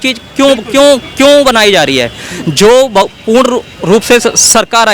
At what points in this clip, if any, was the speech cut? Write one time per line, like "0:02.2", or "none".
none